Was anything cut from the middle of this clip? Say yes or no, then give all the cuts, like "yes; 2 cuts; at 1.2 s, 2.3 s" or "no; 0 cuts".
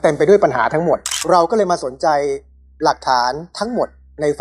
yes; 1 cut; at 1.2 s